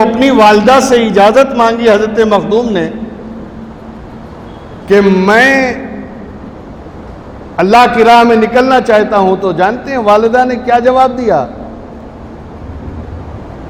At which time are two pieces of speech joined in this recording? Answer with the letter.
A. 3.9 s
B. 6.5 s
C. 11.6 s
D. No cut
D